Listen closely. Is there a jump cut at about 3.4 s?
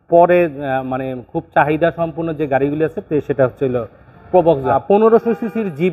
no; 1 cut; at 4.8 s

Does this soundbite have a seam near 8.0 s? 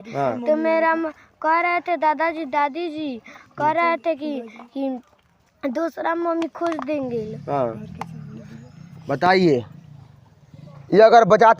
no; 0 cuts

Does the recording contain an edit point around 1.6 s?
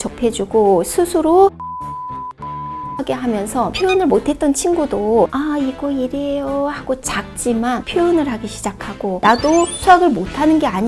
no; 1 cut; at 9.2 s

